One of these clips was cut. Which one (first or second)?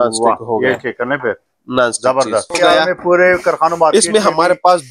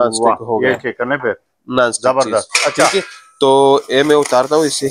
first